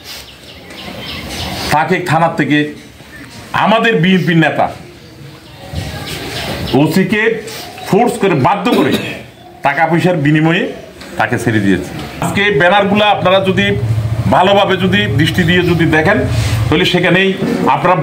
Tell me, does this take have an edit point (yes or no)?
yes